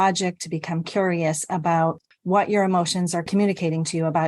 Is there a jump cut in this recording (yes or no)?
yes